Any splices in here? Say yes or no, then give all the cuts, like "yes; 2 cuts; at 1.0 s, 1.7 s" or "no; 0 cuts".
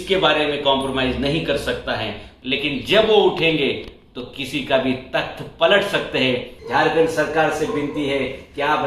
yes; 2 cuts; at 2.3 s, 6.5 s